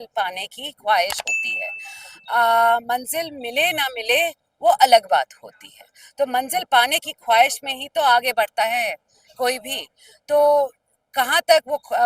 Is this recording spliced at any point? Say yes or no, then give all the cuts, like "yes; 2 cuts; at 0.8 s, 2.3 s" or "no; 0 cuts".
no; 0 cuts